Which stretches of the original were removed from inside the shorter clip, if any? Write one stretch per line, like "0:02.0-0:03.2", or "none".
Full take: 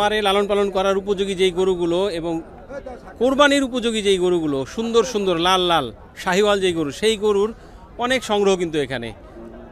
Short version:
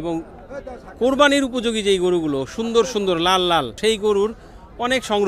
0:05.9-0:06.9